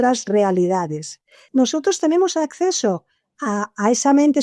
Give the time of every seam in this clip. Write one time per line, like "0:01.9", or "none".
0:01.4